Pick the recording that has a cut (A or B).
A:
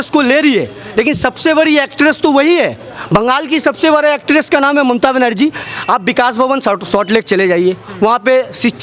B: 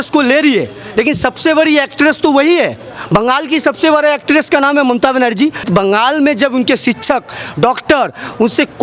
B